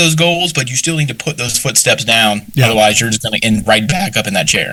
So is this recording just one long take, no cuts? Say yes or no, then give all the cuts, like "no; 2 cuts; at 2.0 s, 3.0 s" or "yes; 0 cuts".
yes; 0 cuts